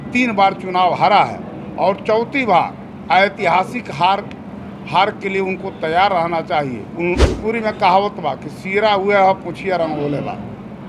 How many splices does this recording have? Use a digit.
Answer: 1